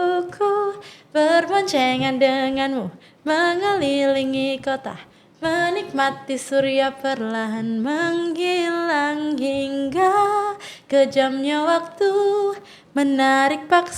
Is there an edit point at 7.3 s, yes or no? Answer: no